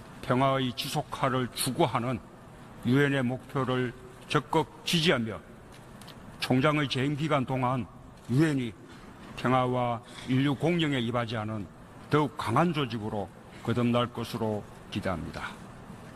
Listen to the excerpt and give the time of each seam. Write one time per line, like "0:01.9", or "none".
0:15.0

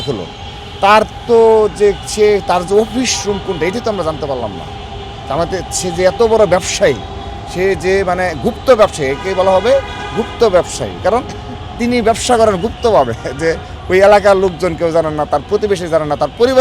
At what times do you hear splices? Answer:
none

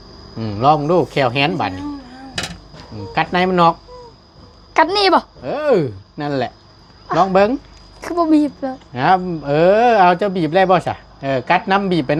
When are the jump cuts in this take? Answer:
none

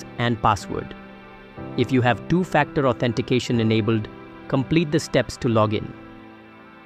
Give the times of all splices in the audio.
0:05.9

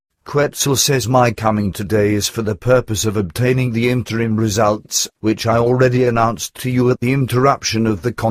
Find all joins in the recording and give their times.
none

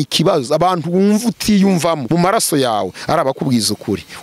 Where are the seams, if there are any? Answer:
0:02.0

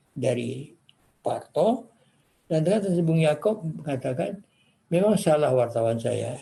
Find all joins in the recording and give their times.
none

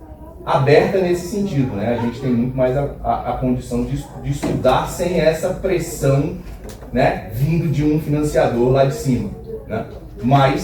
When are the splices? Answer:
none

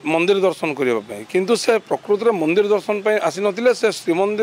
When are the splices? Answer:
none

